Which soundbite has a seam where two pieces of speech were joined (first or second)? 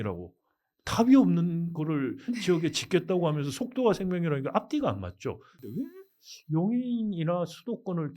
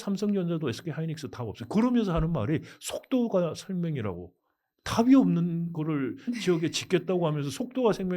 first